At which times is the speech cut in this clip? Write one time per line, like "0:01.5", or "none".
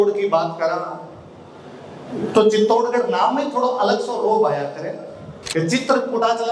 0:05.4

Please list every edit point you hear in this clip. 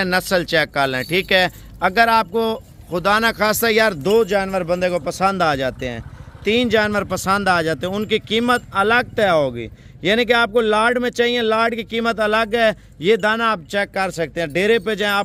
none

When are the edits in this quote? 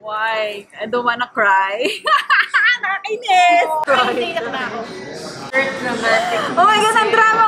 0:03.9
0:05.5

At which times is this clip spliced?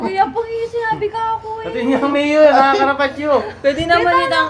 none

